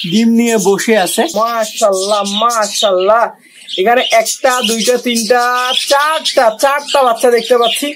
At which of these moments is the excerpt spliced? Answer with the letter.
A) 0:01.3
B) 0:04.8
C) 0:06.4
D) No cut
A